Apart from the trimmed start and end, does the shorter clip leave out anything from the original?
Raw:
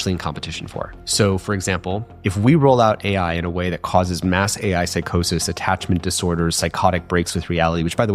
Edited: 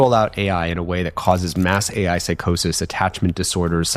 no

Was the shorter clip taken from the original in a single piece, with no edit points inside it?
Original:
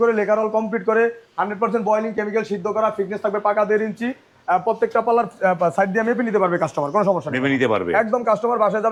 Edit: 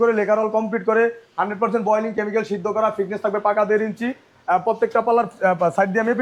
yes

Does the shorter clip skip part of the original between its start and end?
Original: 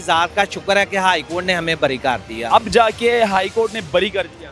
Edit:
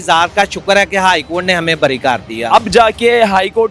no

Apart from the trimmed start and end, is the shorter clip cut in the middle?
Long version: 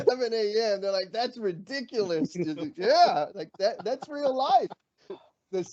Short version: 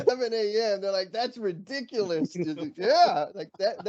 no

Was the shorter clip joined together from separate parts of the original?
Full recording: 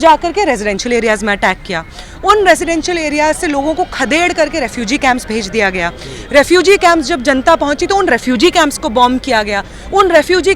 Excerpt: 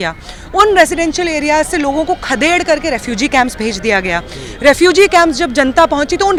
no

